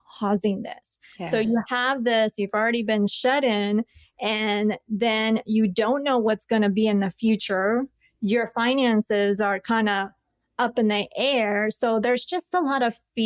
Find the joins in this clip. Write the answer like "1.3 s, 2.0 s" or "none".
none